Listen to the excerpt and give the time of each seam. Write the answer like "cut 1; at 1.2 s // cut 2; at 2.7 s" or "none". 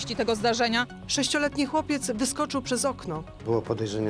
cut 1; at 1.0 s

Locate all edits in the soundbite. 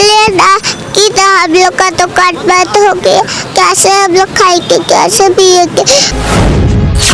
cut 1; at 6.1 s

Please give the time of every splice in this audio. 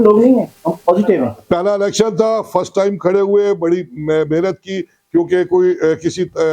cut 1; at 1.3 s

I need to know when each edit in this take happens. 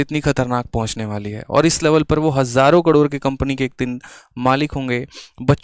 none

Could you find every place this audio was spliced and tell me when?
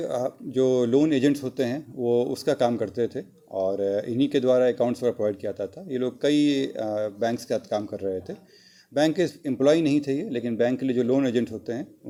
none

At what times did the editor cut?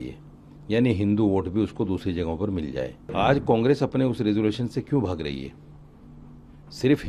cut 1; at 3.1 s

